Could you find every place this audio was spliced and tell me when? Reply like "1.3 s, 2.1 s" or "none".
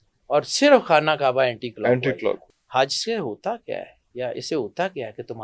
2.5 s

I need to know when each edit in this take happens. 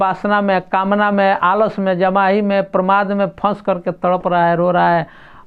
none

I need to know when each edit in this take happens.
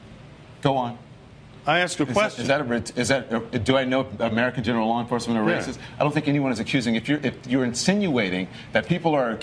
none

